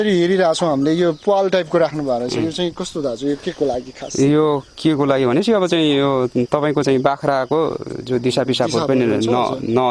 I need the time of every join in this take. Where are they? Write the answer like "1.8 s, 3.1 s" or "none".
none